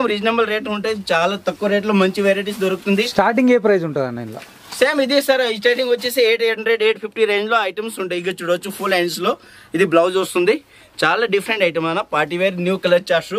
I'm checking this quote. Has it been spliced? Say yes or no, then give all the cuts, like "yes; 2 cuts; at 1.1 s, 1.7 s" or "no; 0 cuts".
no; 0 cuts